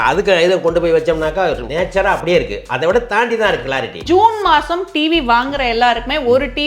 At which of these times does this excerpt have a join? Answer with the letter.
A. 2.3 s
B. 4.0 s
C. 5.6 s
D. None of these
B